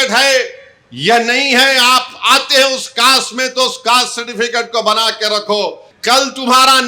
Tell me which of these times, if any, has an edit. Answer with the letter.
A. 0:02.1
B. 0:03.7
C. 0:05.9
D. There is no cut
C